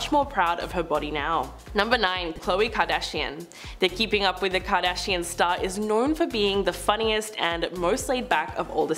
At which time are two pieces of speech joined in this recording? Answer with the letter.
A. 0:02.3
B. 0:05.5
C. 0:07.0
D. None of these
A